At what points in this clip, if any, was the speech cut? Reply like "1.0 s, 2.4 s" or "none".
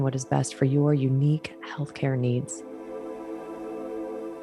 2.6 s